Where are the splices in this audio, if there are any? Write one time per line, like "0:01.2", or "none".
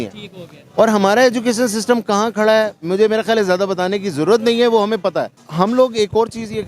0:05.3